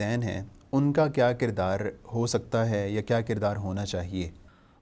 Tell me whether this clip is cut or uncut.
uncut